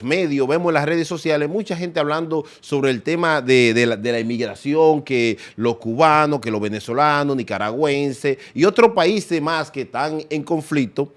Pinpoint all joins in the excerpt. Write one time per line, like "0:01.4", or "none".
none